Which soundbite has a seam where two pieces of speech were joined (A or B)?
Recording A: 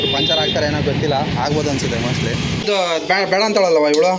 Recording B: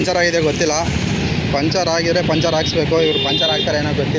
A